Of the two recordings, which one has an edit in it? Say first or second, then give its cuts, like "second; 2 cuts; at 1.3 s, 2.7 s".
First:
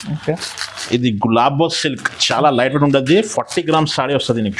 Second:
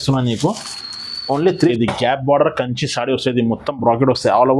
second; 1 cut; at 1.7 s